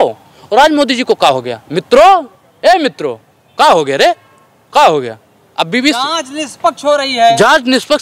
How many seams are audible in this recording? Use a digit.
0